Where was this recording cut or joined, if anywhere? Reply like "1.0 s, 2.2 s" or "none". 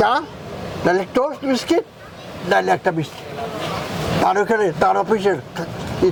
none